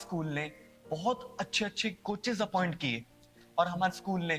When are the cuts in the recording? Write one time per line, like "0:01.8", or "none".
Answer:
0:03.4